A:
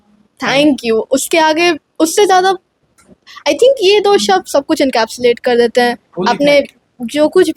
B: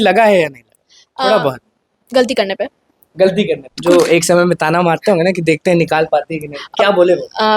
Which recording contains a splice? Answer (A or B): B